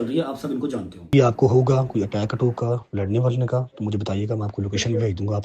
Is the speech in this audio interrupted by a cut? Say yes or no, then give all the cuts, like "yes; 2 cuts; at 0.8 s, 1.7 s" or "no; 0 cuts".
yes; 1 cut; at 1.1 s